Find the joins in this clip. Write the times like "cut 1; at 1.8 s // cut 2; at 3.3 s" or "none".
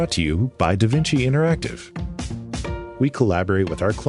cut 1; at 2.8 s